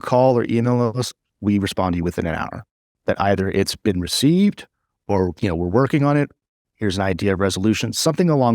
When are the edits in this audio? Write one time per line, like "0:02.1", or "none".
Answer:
none